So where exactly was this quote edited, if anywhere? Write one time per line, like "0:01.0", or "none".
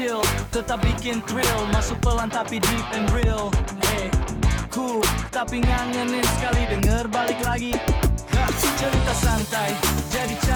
none